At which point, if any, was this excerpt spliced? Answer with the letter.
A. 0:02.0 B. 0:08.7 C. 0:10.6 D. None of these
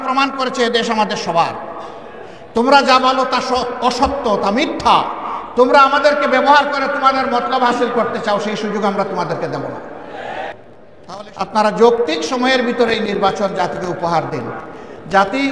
C